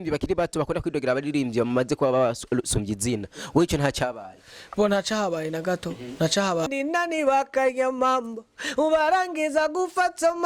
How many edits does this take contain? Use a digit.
1